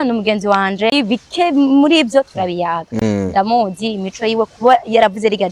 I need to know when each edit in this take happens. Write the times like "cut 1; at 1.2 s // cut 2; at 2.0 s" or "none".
cut 1; at 0.9 s